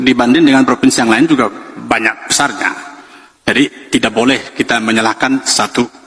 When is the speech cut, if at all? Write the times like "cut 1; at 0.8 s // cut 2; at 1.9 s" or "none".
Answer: none

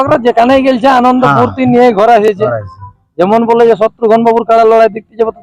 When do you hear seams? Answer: none

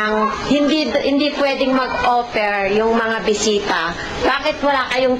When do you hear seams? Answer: none

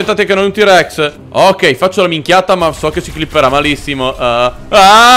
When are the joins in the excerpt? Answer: cut 1; at 1.2 s

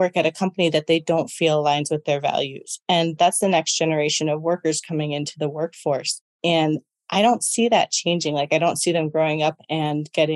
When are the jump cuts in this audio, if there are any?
cut 1; at 3.1 s

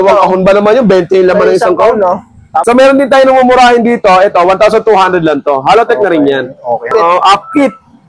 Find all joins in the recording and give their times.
cut 1; at 2.5 s // cut 2; at 6.9 s

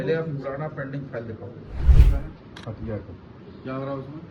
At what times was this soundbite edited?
cut 1; at 2.1 s

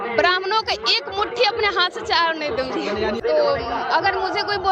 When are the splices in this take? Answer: cut 1; at 3.2 s

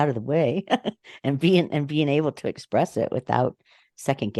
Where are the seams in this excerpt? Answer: none

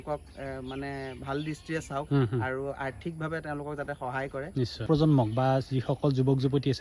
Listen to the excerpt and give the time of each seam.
cut 1; at 4.8 s

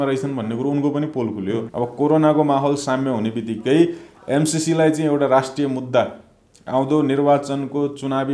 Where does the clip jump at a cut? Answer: cut 1; at 1.7 s

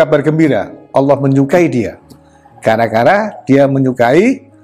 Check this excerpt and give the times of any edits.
none

